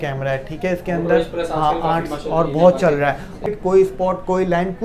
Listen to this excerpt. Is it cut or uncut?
cut